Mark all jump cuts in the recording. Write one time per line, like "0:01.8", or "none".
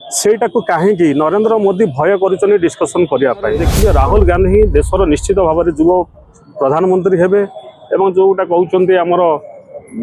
0:03.7